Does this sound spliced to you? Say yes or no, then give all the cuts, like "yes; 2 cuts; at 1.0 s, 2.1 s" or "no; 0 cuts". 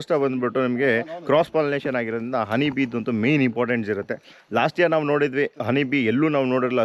no; 0 cuts